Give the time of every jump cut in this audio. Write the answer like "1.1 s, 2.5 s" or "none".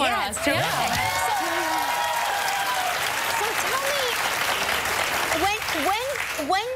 2.3 s